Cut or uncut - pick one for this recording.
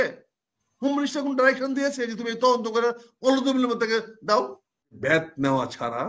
cut